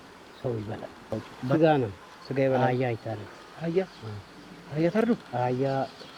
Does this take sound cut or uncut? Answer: cut